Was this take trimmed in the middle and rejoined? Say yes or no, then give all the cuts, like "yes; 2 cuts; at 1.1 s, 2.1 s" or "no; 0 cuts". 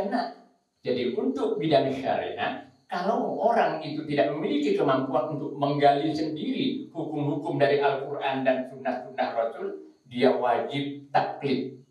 no; 0 cuts